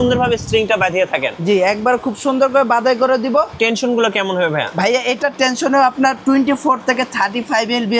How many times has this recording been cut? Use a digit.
1